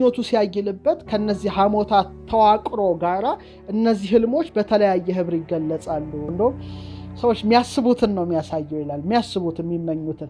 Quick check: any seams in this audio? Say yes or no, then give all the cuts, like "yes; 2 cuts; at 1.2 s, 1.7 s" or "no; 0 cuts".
no; 0 cuts